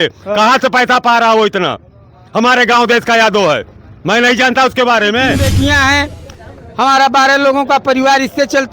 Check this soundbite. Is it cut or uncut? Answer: cut